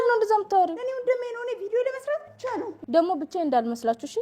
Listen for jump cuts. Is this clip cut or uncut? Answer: cut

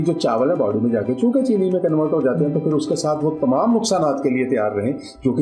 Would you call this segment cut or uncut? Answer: uncut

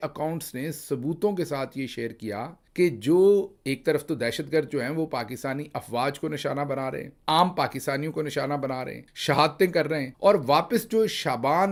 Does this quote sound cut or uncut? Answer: uncut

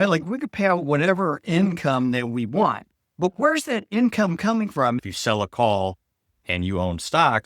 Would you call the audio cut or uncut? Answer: cut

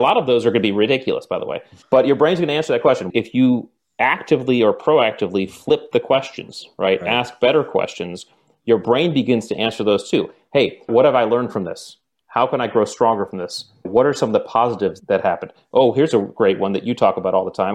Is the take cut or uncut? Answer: cut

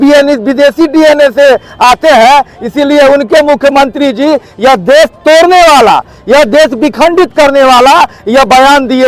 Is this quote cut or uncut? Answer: uncut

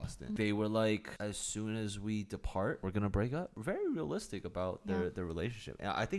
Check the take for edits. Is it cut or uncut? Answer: cut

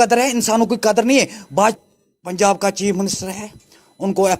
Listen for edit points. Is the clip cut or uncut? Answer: cut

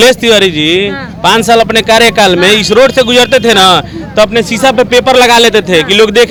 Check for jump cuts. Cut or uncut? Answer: uncut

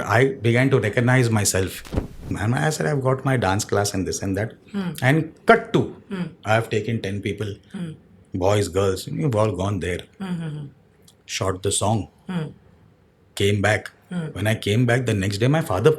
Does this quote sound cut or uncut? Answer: cut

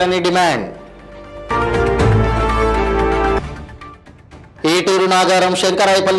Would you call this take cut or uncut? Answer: uncut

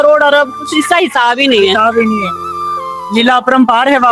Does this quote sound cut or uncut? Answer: uncut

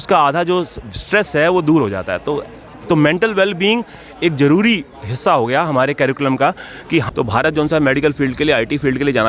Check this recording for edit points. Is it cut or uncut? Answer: cut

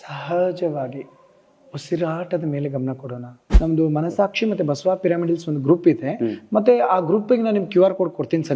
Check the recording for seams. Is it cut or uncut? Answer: cut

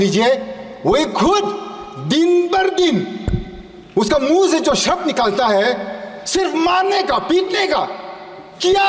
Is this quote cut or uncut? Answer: uncut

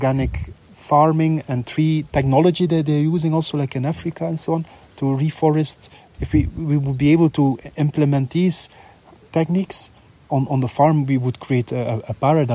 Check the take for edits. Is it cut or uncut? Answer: cut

